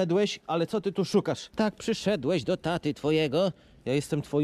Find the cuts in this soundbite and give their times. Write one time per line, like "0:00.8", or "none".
0:01.4